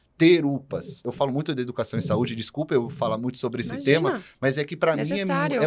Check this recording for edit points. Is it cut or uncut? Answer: cut